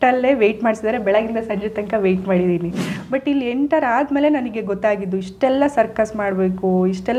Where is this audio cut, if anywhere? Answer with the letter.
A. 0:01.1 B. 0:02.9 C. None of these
B